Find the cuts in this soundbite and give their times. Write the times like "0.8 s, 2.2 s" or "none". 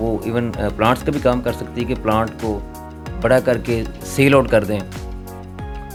none